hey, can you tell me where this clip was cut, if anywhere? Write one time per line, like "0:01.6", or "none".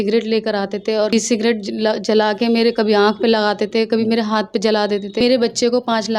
0:01.1
0:05.2